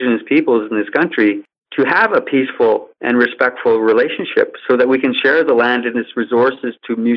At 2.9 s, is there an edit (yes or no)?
yes